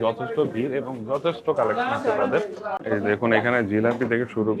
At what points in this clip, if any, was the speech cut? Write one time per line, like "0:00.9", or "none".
0:02.8